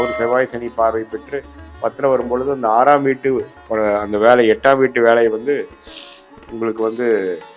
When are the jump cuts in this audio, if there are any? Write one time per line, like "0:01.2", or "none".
none